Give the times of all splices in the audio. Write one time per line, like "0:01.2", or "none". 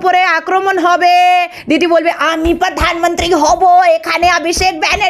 0:01.6